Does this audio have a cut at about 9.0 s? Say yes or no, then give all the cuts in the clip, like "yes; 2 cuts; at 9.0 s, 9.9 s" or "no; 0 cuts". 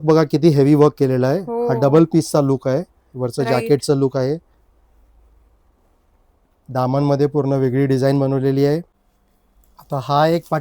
yes; 1 cut; at 9.0 s